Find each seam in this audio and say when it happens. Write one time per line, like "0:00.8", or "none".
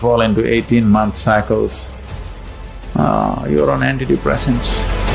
0:01.0